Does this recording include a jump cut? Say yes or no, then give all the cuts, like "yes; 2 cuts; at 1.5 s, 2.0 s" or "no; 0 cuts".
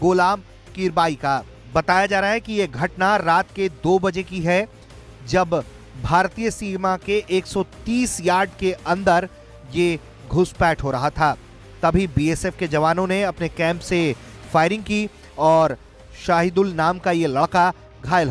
no; 0 cuts